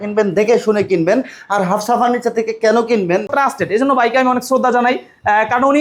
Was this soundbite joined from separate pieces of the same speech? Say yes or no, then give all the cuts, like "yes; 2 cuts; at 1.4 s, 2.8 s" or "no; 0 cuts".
yes; 1 cut; at 3.3 s